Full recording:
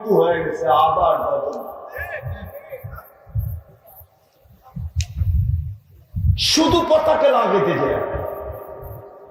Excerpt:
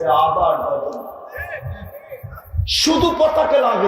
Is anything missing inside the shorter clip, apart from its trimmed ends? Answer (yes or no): yes